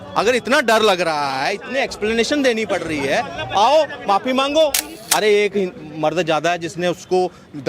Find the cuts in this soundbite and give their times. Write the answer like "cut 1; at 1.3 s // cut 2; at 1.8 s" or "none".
cut 1; at 4.9 s